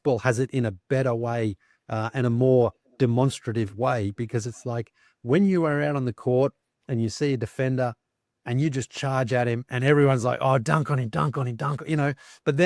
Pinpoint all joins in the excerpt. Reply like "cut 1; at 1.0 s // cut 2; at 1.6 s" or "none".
none